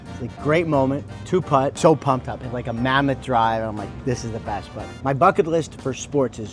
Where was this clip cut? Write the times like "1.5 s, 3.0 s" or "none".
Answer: 1.4 s, 4.9 s